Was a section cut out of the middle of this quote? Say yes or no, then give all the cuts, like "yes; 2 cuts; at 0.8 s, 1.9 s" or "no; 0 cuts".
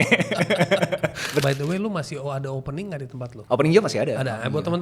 yes; 2 cuts; at 1.4 s, 3.3 s